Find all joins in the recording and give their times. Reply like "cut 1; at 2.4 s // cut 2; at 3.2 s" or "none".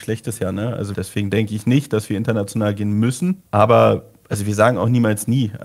cut 1; at 0.9 s // cut 2; at 3.4 s

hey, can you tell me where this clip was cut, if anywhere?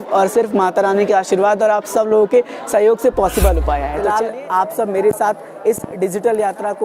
cut 1; at 3.9 s

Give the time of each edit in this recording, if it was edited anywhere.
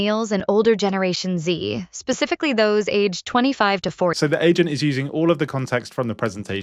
none

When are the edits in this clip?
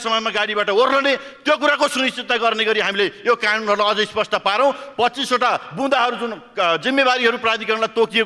none

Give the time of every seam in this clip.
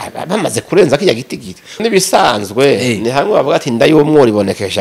cut 1; at 1.8 s

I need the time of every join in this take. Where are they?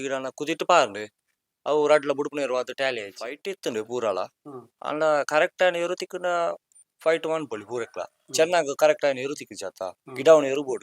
cut 1; at 3.3 s

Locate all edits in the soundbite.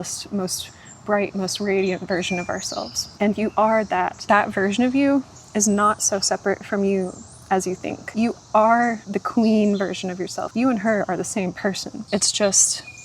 cut 1; at 3.0 s // cut 2; at 4.2 s // cut 3; at 8.0 s // cut 4; at 9.1 s // cut 5; at 10.3 s // cut 6; at 11.9 s

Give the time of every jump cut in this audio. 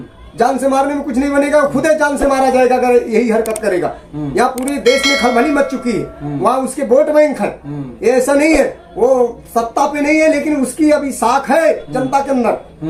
none

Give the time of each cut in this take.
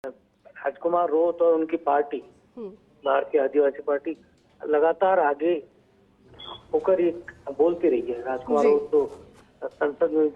none

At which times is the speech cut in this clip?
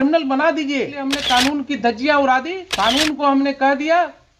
cut 1; at 1.1 s // cut 2; at 2.6 s

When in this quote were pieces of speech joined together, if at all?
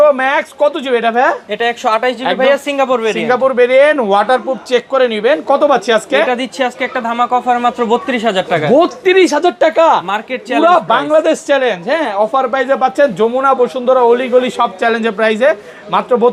none

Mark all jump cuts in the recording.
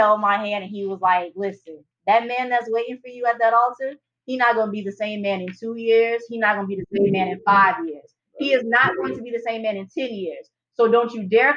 none

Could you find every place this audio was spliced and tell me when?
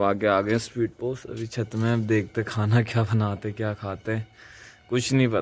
none

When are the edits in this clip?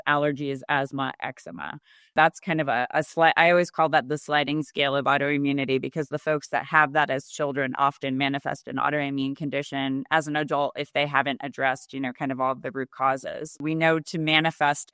cut 1; at 2.1 s // cut 2; at 13.5 s

